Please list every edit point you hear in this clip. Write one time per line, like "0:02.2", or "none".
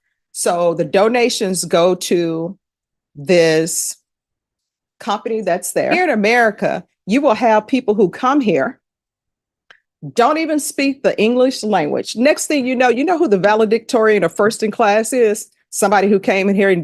0:05.9